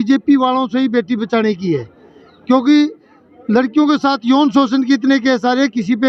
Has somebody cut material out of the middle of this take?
no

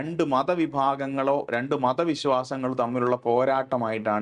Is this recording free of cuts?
yes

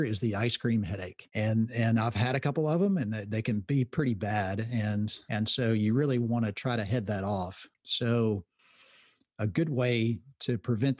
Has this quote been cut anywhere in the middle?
yes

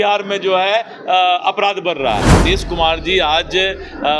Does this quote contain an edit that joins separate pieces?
yes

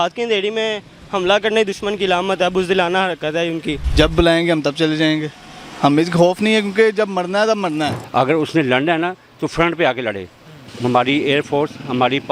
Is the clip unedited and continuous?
no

